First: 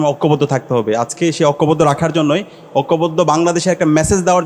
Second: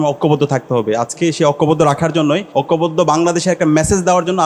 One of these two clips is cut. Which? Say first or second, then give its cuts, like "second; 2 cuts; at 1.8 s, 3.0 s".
second; 1 cut; at 2.4 s